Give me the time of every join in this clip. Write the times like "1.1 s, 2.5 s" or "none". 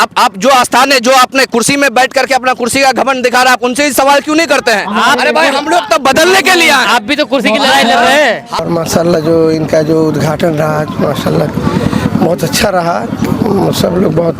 8.6 s